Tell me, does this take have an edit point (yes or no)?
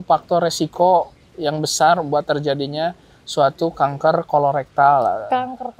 no